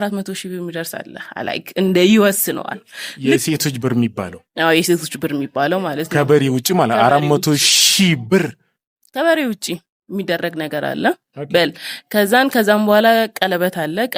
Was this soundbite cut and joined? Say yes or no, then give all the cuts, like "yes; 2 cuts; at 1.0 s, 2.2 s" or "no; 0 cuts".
no; 0 cuts